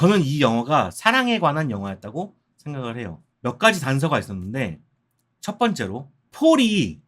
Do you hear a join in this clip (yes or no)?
yes